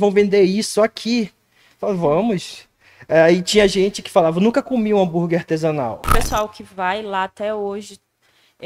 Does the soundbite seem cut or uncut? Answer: cut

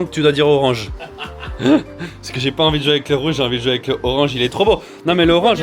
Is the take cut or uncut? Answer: uncut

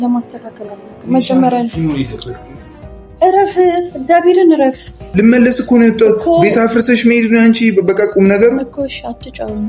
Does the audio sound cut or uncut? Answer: cut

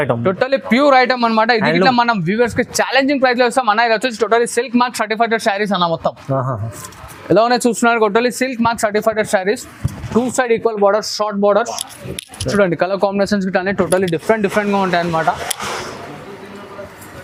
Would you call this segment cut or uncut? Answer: uncut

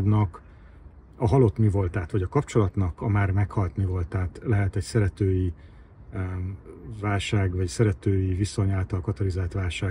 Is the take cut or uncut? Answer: uncut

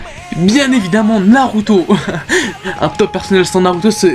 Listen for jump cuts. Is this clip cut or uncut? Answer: uncut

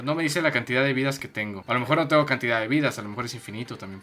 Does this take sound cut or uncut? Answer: cut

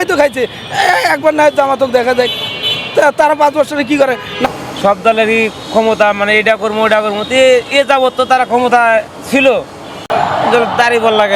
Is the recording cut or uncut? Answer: cut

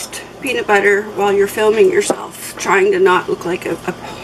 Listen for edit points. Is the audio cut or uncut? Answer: uncut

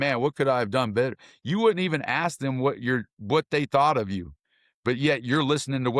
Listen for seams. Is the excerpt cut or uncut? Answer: uncut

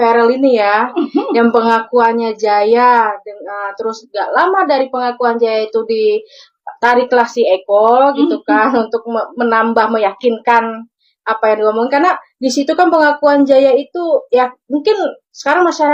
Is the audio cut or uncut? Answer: uncut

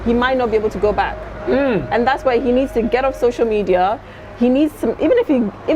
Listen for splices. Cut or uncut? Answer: uncut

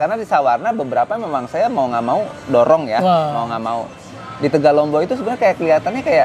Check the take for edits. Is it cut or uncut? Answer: uncut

